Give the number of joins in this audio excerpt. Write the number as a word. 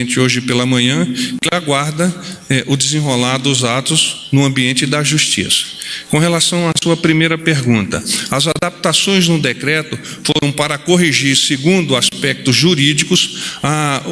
zero